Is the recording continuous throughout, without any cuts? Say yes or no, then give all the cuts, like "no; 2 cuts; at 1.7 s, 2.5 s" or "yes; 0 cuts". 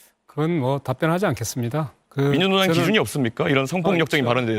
yes; 0 cuts